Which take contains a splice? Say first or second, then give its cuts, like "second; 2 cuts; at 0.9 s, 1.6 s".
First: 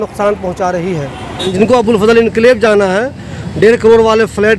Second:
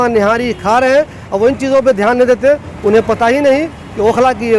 first; 1 cut; at 1.4 s